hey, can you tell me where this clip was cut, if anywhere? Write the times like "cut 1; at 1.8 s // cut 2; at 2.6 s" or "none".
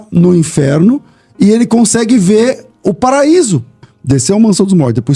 cut 1; at 3.9 s